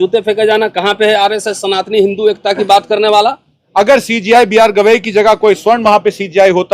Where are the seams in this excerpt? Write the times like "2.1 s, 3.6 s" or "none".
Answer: 3.6 s

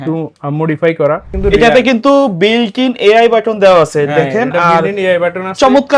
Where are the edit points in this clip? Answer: 1.3 s

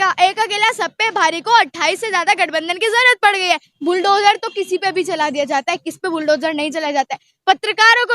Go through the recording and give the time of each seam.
3.7 s

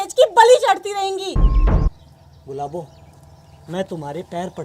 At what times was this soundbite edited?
1.9 s

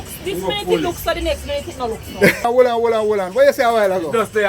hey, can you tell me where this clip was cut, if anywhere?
2.5 s

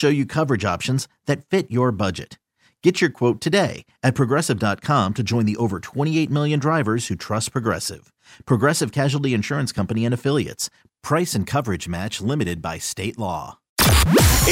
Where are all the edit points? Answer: 13.6 s

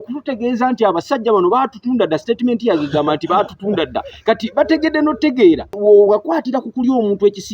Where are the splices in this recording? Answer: 5.7 s

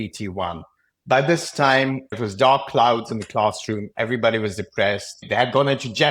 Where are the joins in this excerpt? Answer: 2.1 s, 5.2 s

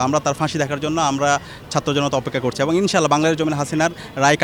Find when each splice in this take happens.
none

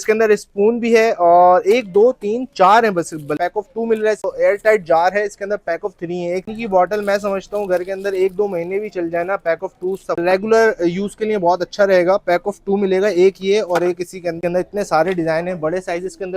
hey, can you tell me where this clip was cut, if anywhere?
3.4 s, 4.2 s, 6.5 s, 10.2 s, 14.4 s

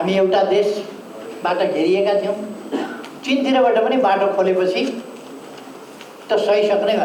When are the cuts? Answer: none

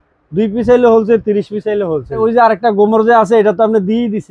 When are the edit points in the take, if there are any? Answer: 2.2 s

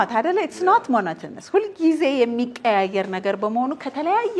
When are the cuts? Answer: none

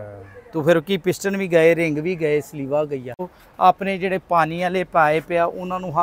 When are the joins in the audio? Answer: 3.4 s

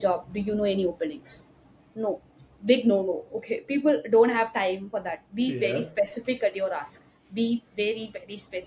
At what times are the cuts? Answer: none

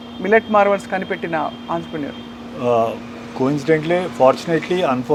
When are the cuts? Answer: none

